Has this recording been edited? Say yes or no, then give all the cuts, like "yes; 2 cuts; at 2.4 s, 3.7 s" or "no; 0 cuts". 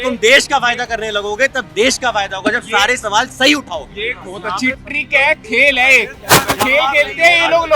no; 0 cuts